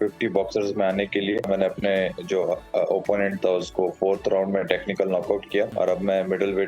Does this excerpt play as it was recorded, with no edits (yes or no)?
no